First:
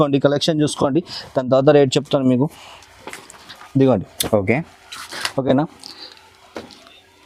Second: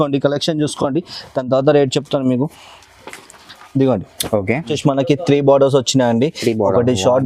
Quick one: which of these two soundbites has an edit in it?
second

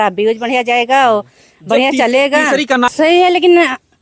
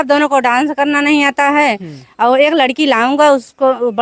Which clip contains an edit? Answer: first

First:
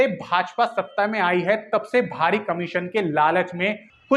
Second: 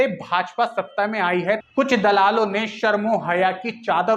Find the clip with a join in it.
second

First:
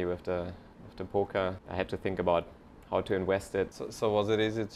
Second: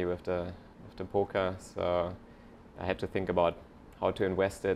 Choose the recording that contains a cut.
first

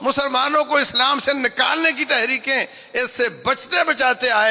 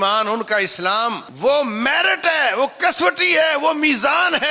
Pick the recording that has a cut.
second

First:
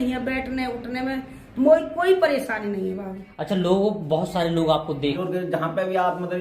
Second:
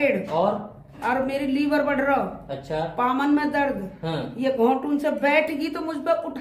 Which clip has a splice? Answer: first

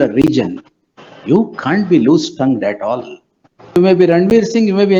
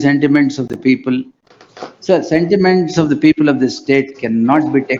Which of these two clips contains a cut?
first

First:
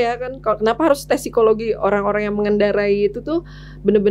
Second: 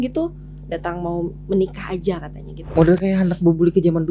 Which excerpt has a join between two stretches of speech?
second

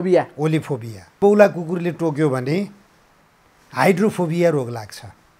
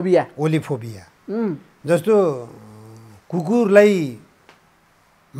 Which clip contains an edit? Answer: first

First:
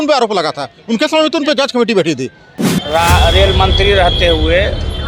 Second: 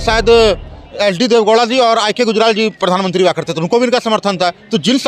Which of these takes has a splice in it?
first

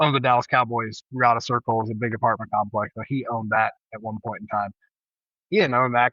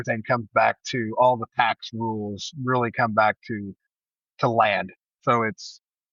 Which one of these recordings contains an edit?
first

